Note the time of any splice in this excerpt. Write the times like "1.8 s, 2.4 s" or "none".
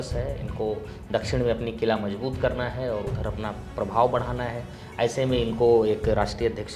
none